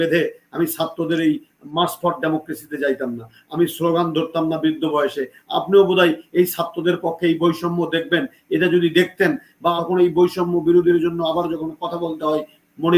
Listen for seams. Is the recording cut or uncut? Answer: cut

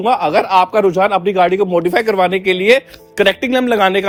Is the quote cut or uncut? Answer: uncut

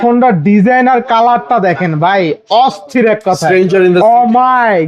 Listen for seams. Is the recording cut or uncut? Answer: uncut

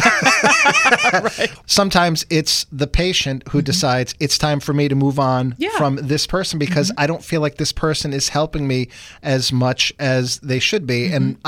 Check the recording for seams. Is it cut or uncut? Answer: cut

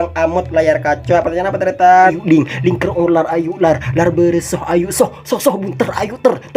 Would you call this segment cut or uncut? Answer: cut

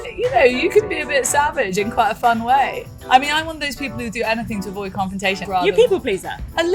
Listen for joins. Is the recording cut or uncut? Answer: cut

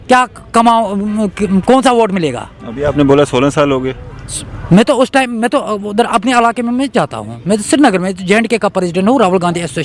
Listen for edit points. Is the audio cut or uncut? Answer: uncut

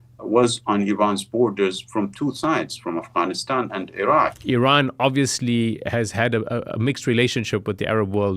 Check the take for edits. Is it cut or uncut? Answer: cut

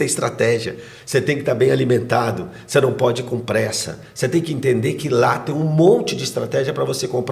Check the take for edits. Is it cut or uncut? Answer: uncut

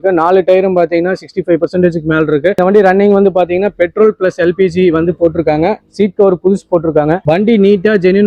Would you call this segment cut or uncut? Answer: uncut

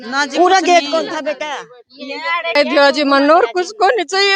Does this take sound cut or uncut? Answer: cut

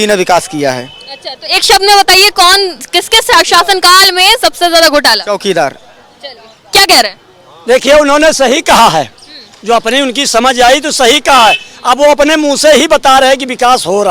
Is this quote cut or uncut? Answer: uncut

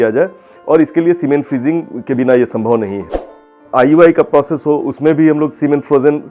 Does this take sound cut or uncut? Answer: cut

